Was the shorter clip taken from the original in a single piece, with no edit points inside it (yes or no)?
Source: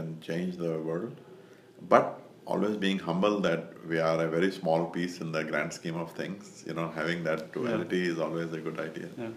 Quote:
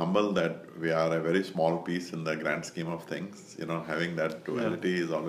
yes